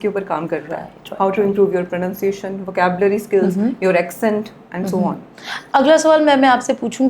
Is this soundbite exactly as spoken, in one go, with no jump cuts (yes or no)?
yes